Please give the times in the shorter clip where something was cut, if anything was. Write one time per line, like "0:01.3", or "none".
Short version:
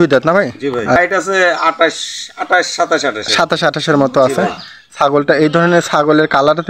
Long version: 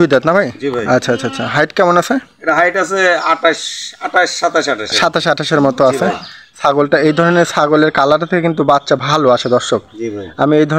0:01.0